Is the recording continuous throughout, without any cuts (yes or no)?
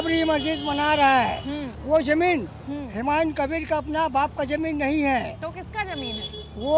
no